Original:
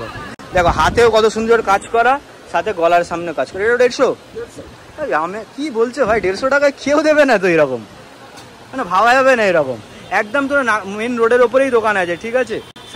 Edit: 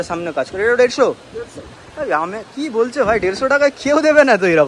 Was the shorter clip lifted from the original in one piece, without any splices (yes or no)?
yes